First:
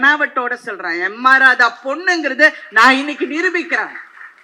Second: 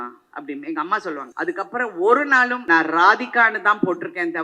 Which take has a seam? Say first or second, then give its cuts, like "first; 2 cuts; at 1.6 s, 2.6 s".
second; 2 cuts; at 1.3 s, 2.6 s